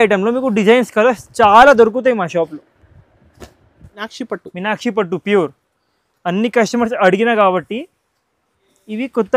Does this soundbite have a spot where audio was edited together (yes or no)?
yes